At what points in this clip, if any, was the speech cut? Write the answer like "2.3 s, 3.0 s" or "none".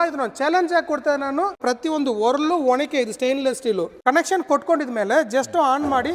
1.6 s, 3.9 s